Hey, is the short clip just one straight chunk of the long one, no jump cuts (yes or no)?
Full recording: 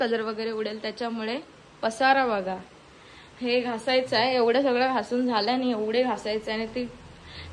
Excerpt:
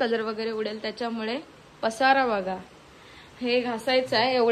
yes